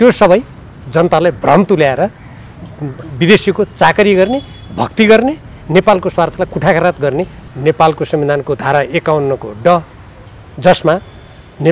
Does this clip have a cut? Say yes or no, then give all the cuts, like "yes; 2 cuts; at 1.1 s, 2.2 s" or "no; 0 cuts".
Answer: yes; 1 cut; at 7.4 s